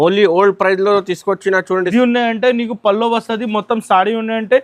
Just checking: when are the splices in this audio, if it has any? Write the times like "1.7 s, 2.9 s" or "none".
1.9 s